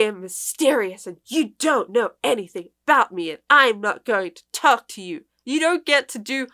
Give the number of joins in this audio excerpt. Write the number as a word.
one